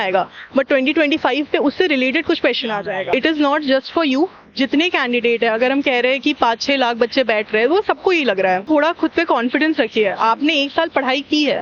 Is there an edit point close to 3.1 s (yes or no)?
yes